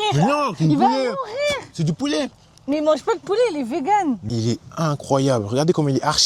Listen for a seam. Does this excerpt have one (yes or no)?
yes